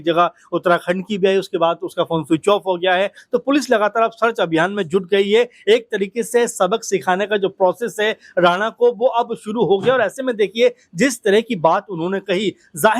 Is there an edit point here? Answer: no; 0 cuts

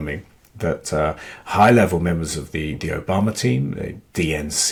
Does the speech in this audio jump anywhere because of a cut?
no; 0 cuts

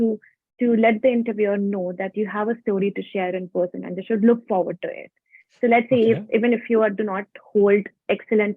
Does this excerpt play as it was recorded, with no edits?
yes; 0 cuts

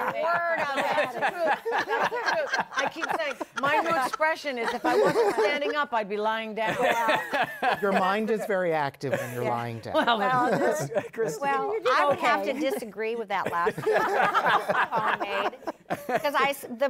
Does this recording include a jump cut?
no; 0 cuts

